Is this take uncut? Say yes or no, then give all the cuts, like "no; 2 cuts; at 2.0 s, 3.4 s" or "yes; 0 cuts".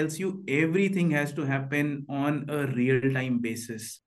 yes; 0 cuts